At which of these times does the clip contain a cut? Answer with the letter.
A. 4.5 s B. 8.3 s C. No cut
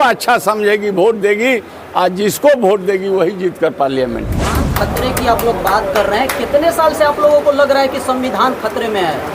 A